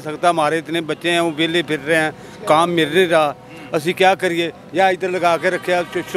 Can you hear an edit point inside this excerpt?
no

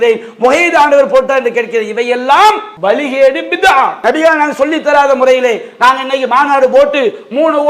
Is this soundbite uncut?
no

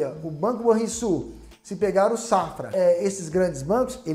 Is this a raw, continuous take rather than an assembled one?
no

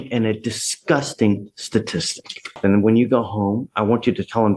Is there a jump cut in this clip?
yes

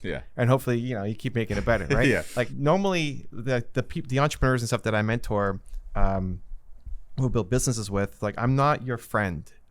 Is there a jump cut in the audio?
yes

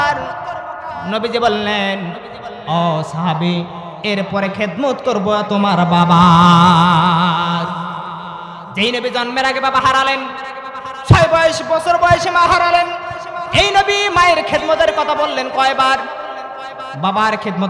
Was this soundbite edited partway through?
no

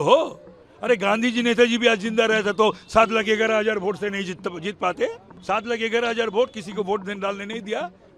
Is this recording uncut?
no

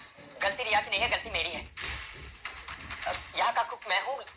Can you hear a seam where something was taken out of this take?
no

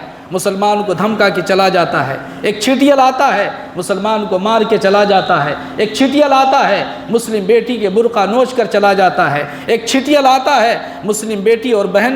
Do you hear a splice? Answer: no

